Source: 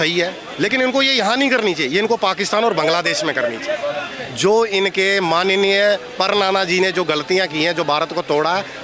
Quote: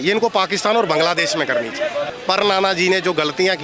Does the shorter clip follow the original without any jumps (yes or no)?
no